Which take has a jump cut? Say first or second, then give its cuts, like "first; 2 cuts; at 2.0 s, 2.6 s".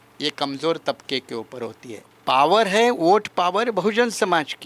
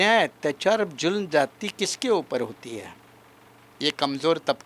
first; 1 cut; at 2.1 s